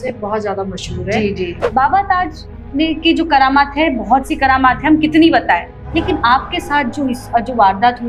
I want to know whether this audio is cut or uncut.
cut